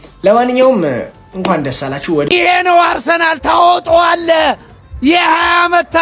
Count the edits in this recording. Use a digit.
1